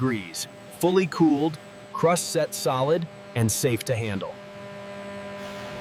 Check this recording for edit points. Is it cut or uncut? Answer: uncut